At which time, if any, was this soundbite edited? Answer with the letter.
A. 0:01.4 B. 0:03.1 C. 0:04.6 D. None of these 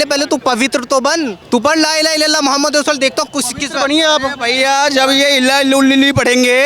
A